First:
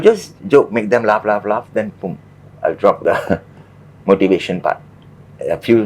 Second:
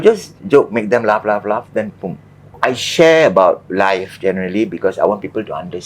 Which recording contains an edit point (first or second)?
second